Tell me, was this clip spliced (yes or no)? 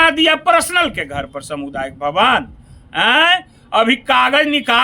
no